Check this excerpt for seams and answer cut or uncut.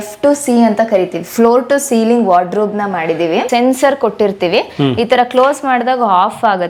cut